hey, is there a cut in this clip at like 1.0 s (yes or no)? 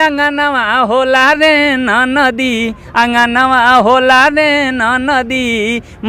no